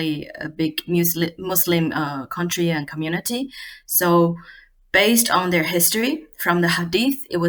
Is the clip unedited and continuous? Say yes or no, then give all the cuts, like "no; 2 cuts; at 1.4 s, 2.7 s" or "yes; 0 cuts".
yes; 0 cuts